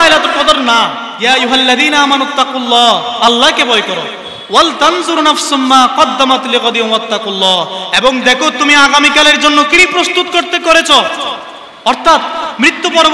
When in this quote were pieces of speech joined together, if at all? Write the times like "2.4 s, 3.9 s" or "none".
1.1 s